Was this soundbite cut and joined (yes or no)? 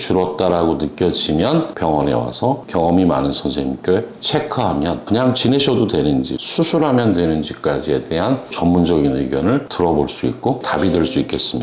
yes